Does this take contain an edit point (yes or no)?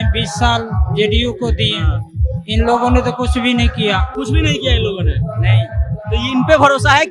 no